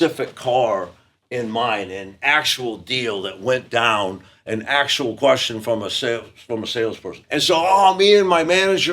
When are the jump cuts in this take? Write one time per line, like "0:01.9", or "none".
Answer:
0:07.2